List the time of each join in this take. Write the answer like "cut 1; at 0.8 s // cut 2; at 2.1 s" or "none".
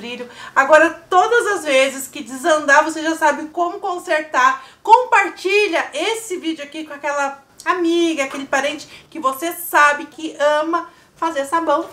cut 1; at 10.1 s